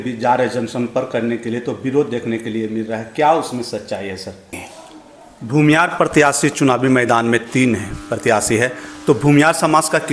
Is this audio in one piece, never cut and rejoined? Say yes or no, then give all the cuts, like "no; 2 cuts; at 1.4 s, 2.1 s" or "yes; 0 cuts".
no; 1 cut; at 4.6 s